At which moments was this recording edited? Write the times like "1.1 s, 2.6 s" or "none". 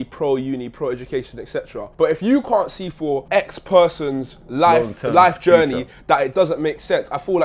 1.8 s, 3.2 s